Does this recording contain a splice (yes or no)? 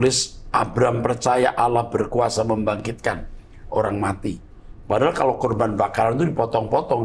no